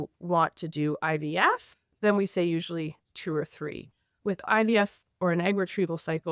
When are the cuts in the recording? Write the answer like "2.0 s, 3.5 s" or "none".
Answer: 4.1 s